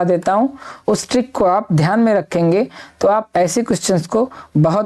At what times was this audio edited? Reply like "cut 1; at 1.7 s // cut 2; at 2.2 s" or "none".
none